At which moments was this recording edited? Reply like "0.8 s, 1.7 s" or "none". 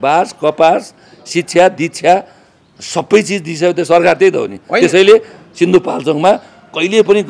none